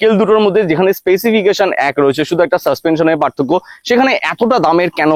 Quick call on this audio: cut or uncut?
uncut